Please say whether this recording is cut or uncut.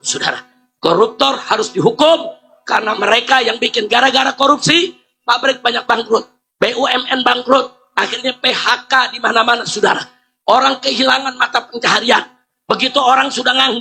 uncut